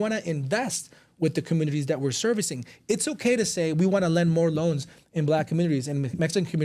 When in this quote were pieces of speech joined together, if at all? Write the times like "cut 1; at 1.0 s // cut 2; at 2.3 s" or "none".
none